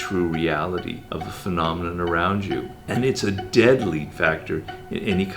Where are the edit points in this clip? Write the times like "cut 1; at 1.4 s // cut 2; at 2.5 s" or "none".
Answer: cut 1; at 1.0 s // cut 2; at 4.1 s